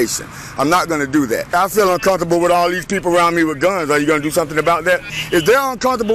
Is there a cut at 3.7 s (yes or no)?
no